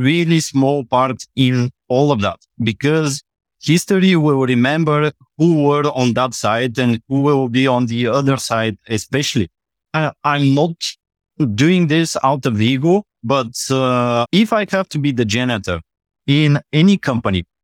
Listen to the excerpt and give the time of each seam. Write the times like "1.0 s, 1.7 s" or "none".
14.3 s